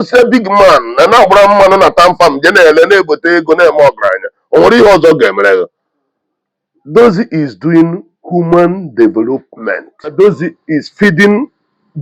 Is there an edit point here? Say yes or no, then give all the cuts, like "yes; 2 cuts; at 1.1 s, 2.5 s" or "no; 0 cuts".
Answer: yes; 1 cut; at 10.1 s